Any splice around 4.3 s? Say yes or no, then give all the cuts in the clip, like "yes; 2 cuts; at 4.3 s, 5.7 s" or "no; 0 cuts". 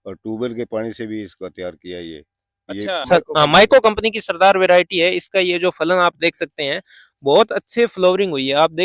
no; 1 cut; at 3.0 s